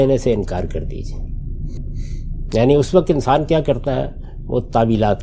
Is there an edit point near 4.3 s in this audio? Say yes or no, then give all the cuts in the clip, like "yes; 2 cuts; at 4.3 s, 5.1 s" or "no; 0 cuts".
no; 1 cut; at 1.8 s